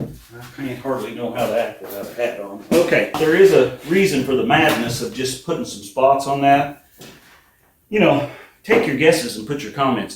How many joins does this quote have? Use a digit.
1